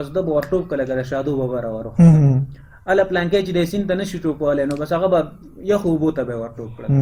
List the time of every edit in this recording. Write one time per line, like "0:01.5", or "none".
none